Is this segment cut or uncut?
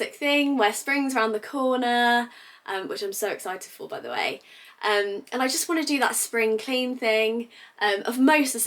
uncut